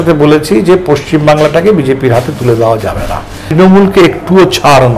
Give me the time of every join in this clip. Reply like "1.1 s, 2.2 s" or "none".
3.4 s